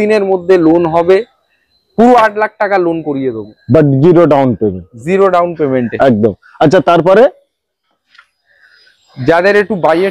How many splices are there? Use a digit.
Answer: 0